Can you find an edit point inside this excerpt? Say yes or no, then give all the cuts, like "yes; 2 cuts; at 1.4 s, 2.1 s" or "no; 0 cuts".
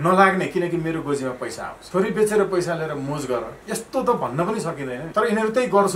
yes; 3 cuts; at 1.7 s, 3.6 s, 5.0 s